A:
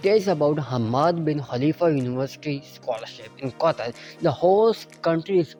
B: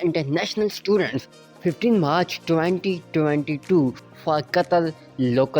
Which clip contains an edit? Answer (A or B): B